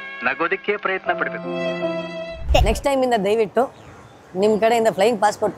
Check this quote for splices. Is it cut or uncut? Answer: cut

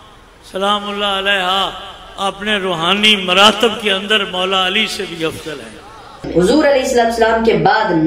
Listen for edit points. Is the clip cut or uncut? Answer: cut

